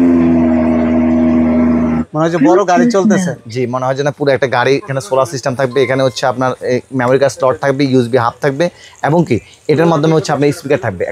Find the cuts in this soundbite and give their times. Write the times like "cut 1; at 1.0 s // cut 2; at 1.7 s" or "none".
none